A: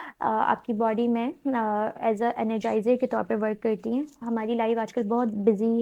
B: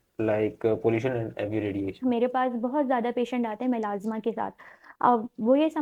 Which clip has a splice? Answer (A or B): B